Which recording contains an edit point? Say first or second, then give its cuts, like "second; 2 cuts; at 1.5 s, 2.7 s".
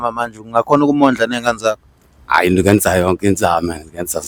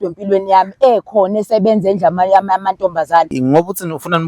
second; 1 cut; at 3.3 s